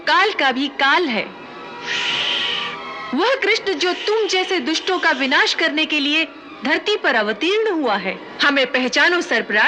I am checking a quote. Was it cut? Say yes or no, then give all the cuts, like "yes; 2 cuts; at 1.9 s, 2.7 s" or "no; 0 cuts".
no; 0 cuts